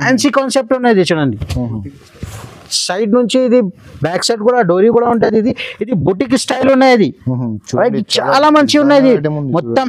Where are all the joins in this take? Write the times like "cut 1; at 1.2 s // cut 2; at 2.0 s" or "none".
none

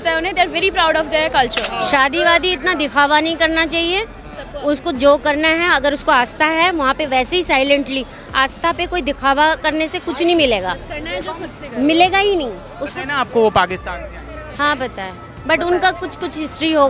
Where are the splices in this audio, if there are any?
cut 1; at 1.7 s

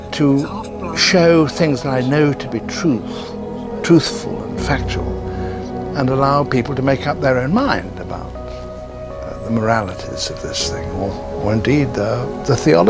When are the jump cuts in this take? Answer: none

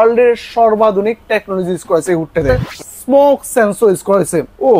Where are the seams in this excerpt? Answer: cut 1; at 2.5 s

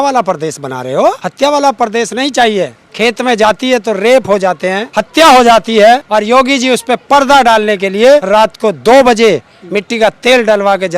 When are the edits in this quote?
cut 1; at 1.3 s // cut 2; at 2.8 s // cut 3; at 4.8 s // cut 4; at 6.0 s // cut 5; at 8.2 s

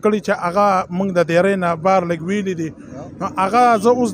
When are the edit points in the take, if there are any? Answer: none

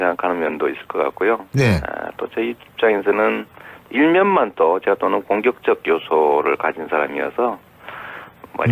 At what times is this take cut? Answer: none

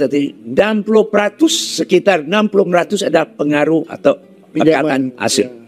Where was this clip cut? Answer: none

